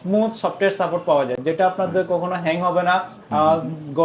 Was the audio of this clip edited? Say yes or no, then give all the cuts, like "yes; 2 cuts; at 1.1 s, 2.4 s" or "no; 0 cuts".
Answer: no; 0 cuts